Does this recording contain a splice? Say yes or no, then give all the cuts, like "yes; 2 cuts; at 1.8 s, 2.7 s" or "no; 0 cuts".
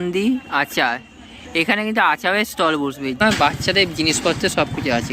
yes; 1 cut; at 3.2 s